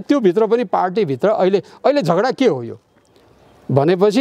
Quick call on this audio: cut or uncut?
uncut